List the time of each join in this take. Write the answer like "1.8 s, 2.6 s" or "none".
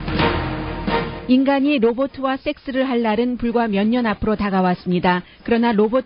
none